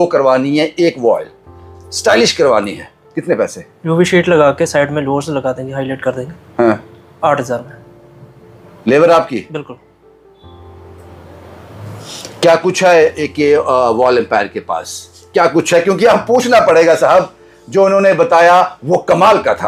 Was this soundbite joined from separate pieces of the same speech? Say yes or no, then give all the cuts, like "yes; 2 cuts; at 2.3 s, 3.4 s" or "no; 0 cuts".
no; 0 cuts